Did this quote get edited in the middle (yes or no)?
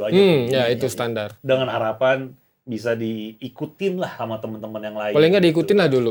no